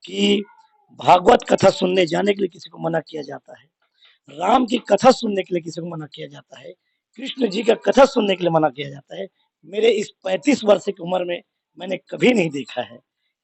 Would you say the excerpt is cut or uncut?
uncut